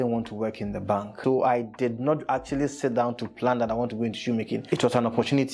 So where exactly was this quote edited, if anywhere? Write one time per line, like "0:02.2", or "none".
0:01.2
0:04.6